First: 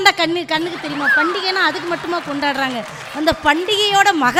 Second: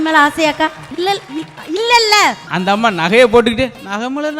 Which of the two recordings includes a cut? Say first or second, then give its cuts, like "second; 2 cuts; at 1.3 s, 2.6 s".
second; 2 cuts; at 0.8 s, 2.5 s